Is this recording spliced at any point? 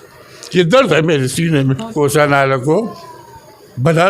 yes; 1 cut; at 1.8 s

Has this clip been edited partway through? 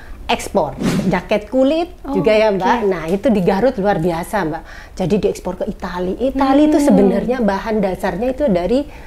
yes; 1 cut; at 0.9 s

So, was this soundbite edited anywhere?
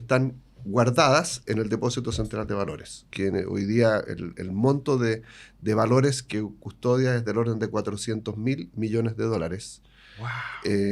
yes; 1 cut; at 3.1 s

